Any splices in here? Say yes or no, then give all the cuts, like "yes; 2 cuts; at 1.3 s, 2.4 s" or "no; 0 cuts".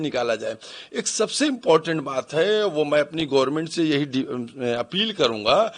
no; 0 cuts